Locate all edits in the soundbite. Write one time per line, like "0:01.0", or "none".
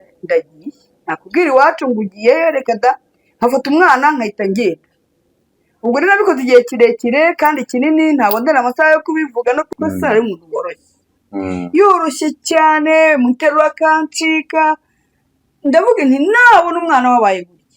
0:09.7